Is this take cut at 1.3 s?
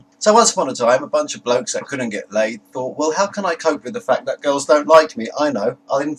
yes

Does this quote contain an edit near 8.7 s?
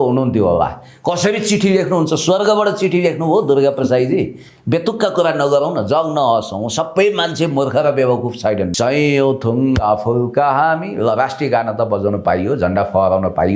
yes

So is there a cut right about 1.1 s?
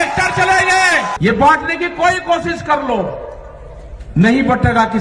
yes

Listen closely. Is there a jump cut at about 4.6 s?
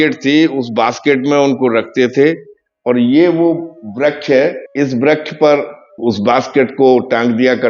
yes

